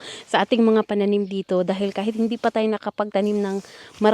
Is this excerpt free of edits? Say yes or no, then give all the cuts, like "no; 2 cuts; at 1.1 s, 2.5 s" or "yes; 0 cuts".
yes; 0 cuts